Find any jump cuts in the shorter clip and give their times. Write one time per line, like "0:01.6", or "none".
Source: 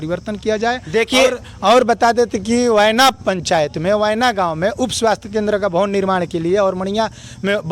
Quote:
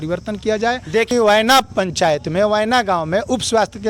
0:01.1